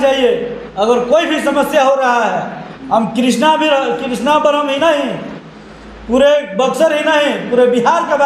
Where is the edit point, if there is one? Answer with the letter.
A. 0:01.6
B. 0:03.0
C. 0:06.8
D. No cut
D